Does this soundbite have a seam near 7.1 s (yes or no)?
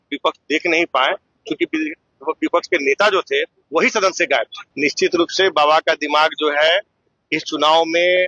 no